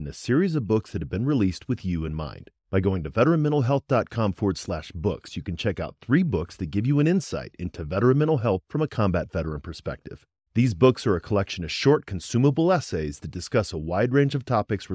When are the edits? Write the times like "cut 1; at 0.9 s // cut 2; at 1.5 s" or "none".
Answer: none